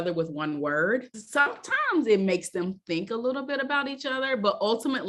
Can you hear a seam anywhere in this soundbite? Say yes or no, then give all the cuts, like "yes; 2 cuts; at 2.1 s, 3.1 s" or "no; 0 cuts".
yes; 1 cut; at 1.2 s